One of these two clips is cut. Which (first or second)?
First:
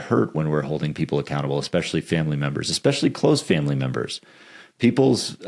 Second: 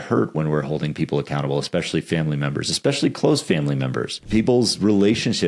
second